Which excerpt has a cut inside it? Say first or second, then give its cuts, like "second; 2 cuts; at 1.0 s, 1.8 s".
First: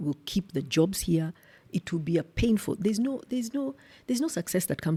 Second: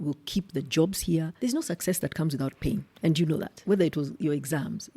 second; 2 cuts; at 1.3 s, 3.2 s